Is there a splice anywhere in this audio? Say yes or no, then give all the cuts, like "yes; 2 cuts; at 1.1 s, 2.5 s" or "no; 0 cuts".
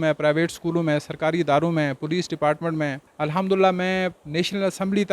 yes; 2 cuts; at 3.0 s, 4.2 s